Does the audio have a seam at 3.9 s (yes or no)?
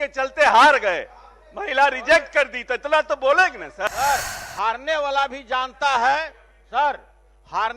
yes